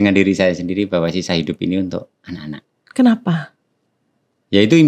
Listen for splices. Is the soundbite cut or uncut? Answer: uncut